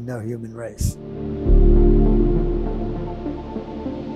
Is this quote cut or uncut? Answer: uncut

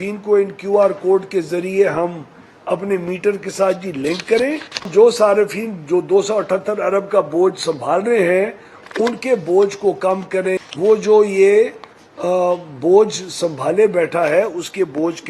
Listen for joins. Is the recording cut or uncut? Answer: cut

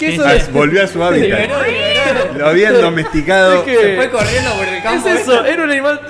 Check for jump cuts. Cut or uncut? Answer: uncut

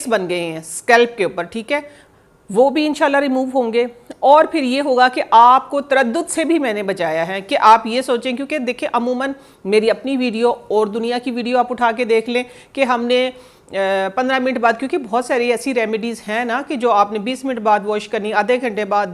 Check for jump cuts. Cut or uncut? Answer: uncut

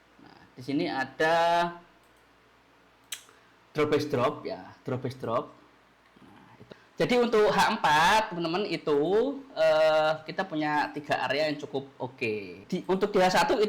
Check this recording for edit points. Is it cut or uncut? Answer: cut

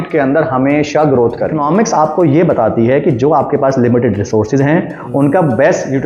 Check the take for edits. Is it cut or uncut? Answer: cut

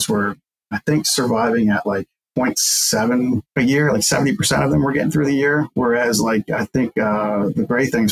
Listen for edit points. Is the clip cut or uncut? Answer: cut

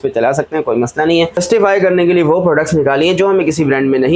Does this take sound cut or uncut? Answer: cut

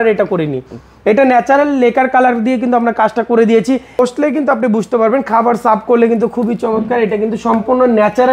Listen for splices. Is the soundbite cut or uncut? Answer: cut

